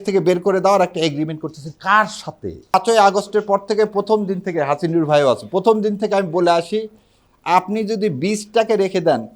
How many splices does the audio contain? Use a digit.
1